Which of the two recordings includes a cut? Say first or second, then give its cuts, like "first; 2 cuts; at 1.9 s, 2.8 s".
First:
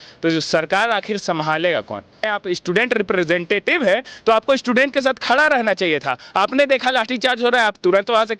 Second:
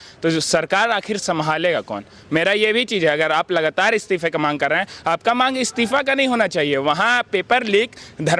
first; 1 cut; at 2.3 s